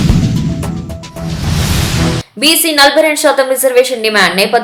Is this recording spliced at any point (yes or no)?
no